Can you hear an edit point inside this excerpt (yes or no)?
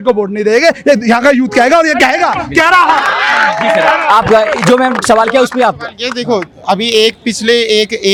no